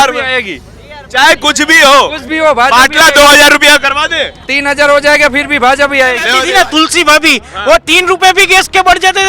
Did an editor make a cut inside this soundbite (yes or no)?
yes